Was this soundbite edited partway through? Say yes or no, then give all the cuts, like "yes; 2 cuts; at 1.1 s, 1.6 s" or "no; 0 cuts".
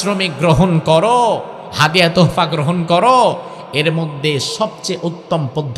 no; 0 cuts